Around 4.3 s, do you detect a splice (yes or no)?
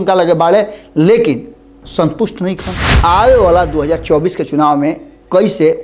no